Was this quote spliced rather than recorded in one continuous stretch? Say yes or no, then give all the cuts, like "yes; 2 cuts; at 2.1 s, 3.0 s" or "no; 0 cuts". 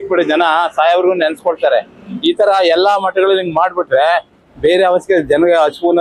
no; 0 cuts